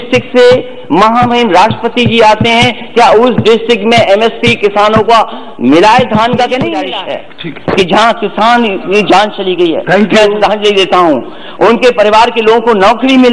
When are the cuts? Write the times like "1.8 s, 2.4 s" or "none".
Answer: 7.0 s